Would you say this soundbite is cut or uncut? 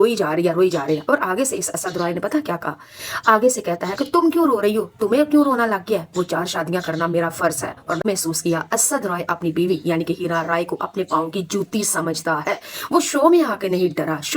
cut